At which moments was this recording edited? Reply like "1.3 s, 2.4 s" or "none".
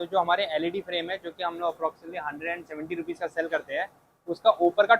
none